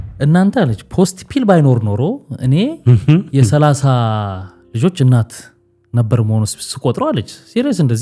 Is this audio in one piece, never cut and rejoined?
yes; 0 cuts

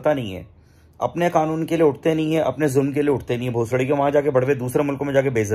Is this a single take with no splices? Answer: yes; 0 cuts

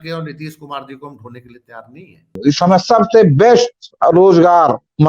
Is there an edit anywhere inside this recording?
yes; 1 cut; at 2.4 s

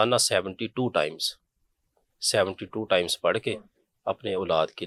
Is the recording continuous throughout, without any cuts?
yes; 0 cuts

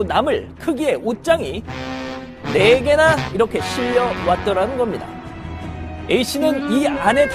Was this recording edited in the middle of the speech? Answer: no; 0 cuts

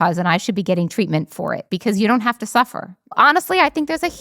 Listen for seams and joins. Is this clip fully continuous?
no; 2 cuts; at 1.7 s, 3.2 s

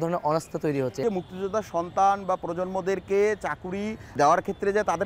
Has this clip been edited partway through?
yes; 2 cuts; at 1.0 s, 4.1 s

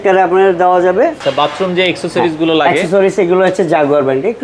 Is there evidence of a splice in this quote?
yes; 1 cut; at 1.2 s

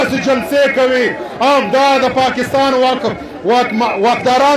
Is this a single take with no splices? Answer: yes; 0 cuts

